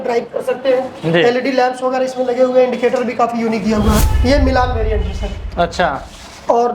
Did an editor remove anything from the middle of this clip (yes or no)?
yes